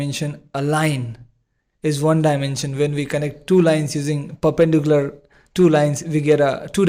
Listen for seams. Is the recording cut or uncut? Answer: uncut